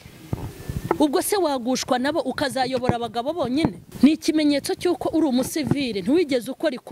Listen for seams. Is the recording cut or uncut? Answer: cut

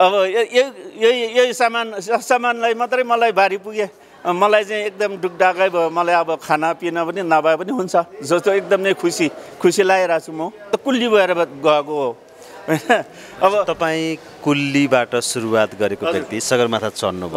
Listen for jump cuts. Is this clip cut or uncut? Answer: cut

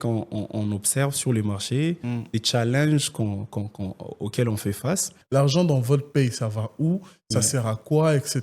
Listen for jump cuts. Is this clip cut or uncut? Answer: cut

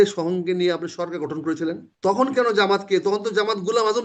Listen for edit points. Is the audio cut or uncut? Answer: cut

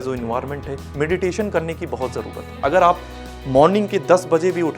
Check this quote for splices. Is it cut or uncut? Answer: uncut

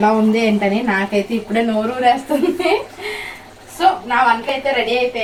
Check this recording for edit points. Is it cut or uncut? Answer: uncut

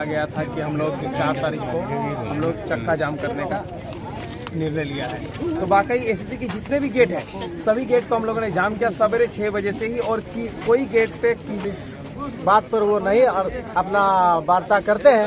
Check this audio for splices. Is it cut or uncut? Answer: cut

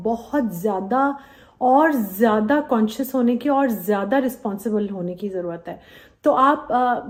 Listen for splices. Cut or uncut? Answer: uncut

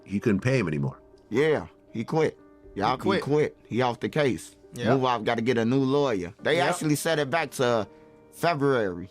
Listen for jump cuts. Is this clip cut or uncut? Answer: uncut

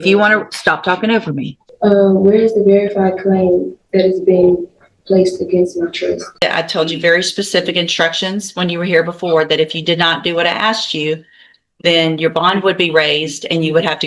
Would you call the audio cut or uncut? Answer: cut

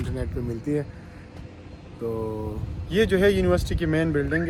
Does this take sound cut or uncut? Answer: uncut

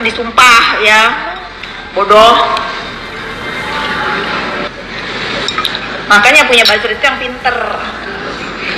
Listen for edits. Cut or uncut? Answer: uncut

